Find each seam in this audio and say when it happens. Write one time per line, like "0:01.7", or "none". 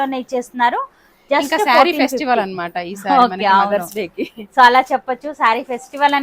none